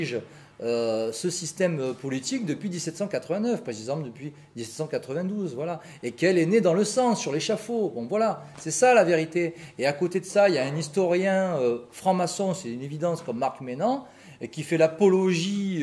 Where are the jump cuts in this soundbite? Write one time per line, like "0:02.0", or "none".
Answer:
none